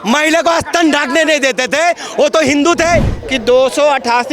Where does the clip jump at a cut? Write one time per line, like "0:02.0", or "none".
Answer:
0:03.2